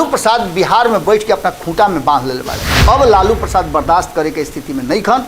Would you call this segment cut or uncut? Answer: cut